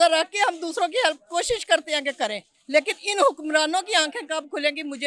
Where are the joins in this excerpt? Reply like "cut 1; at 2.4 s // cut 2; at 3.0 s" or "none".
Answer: none